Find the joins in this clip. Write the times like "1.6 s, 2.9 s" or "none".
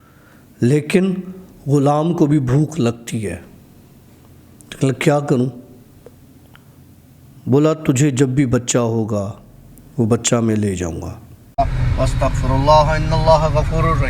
11.5 s